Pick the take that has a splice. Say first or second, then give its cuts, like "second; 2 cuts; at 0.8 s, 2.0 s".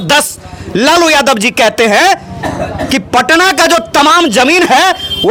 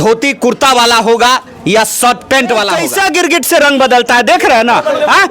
second; 1 cut; at 2.8 s